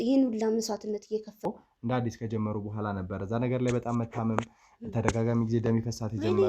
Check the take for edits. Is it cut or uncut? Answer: cut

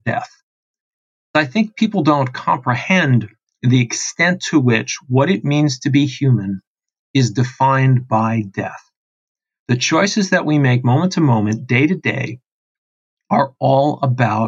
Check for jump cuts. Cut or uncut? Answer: cut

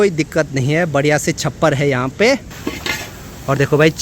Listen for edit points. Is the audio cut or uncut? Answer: cut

